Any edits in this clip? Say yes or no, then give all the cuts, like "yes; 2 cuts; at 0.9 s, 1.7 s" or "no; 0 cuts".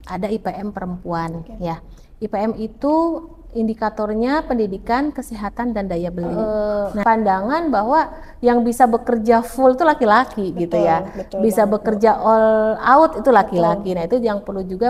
yes; 1 cut; at 6.3 s